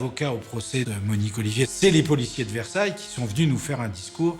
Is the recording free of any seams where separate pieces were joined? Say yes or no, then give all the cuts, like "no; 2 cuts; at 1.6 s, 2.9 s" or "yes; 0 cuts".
no; 1 cut; at 1.7 s